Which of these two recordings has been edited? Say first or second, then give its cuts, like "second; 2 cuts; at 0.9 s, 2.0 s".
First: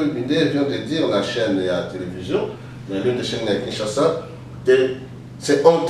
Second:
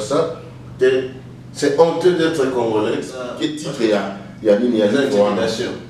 second; 1 cut; at 3.2 s